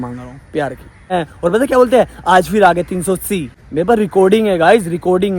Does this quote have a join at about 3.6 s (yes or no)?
yes